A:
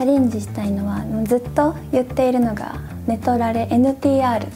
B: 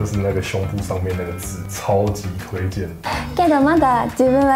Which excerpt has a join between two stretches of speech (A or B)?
B